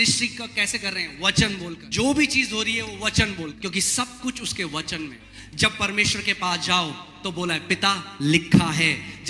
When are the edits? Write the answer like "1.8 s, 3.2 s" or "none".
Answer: 1.8 s, 3.6 s, 5.2 s